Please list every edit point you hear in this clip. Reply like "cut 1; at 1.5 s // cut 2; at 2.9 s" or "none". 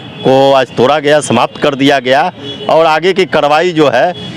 none